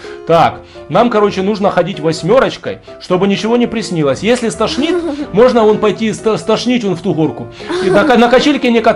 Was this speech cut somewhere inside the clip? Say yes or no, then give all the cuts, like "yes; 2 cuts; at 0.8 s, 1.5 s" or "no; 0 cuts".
no; 0 cuts